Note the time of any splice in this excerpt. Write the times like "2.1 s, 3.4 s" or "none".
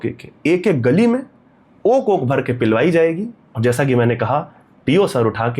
none